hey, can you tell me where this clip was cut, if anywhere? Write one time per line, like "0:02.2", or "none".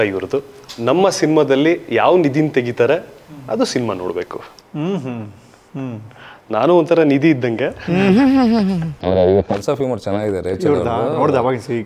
0:09.0